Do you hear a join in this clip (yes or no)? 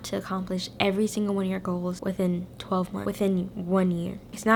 no